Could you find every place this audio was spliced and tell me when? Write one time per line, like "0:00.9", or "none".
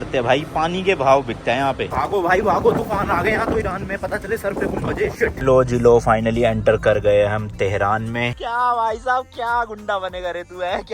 0:01.9
0:05.4
0:08.3